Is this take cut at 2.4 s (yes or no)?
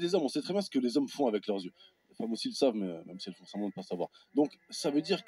yes